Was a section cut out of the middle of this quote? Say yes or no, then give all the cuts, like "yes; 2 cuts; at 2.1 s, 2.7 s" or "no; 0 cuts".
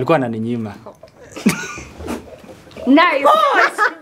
no; 0 cuts